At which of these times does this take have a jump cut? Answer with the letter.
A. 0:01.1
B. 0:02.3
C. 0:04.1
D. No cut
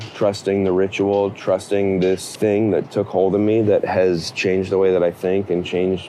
B